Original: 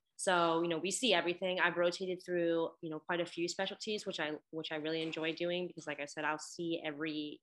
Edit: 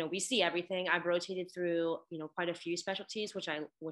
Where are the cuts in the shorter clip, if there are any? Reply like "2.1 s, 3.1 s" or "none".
none